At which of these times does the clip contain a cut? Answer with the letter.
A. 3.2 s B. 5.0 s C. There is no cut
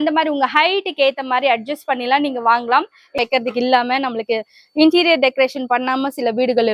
A